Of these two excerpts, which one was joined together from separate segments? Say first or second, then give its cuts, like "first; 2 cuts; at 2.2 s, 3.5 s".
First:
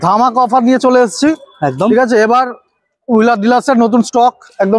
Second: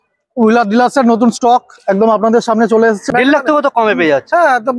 second; 1 cut; at 3.1 s